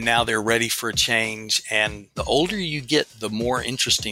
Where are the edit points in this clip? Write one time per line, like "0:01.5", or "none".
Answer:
0:02.1